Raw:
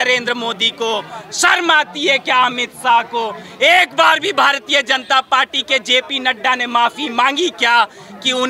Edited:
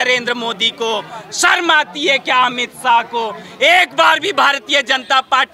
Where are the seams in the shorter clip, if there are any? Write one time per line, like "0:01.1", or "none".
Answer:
none